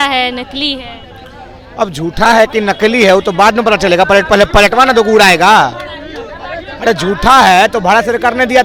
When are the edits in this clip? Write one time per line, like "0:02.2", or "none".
none